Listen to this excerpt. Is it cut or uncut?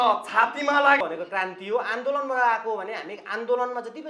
cut